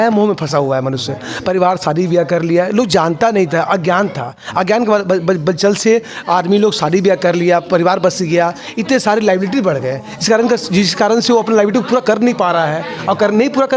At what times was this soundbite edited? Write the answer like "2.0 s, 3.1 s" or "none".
none